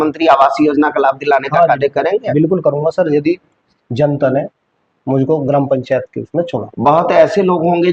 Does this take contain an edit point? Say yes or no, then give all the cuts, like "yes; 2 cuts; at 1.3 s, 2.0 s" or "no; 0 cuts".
no; 0 cuts